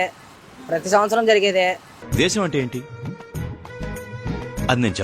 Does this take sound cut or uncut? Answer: cut